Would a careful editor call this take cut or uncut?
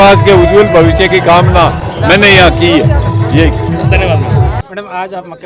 uncut